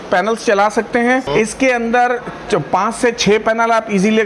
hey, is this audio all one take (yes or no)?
no